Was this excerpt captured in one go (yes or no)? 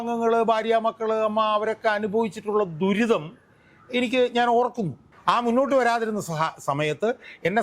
no